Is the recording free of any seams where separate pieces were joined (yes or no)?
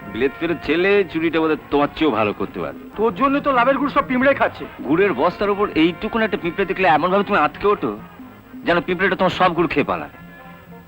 no